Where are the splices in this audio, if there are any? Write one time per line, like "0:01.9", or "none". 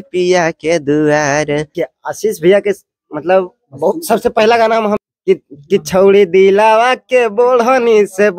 0:01.7
0:05.1